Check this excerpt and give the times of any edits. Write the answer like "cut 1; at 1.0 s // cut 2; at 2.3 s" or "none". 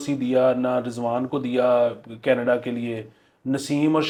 none